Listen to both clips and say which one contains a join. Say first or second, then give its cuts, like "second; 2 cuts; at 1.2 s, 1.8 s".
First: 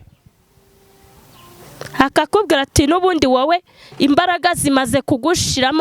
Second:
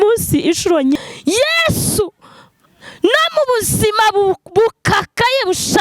second; 1 cut; at 1.0 s